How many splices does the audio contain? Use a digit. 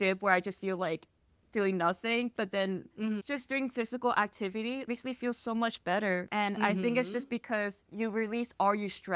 1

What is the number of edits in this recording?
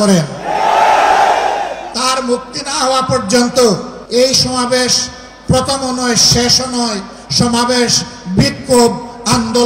2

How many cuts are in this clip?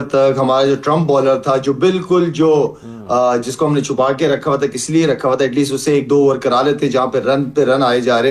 0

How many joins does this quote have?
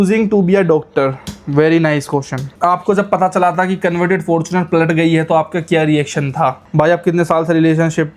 2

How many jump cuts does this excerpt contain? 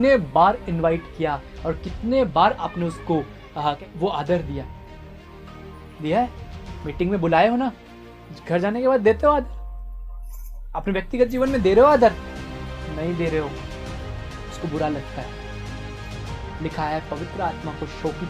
1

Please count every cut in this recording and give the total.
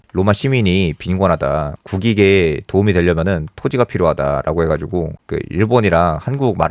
2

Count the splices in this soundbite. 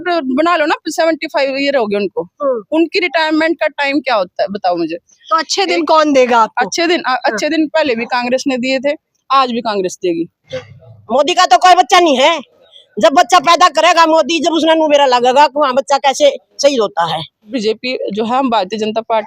2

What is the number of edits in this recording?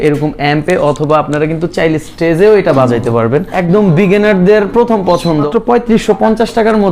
2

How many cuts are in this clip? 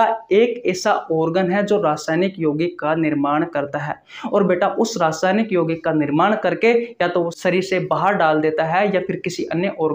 1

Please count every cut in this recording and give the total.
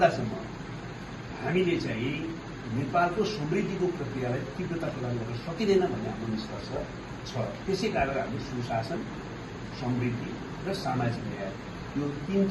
0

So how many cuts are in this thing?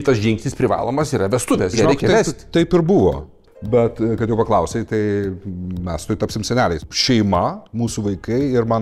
2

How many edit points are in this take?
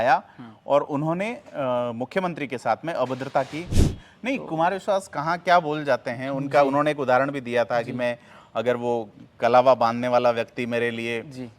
1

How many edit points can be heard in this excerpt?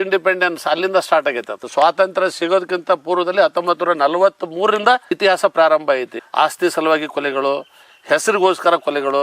2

